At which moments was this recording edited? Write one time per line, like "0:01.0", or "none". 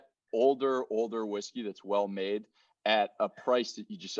none